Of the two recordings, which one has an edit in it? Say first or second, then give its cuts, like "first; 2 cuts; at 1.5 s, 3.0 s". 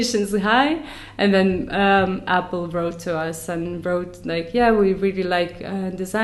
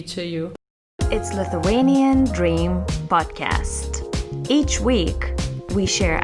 second; 1 cut; at 1.0 s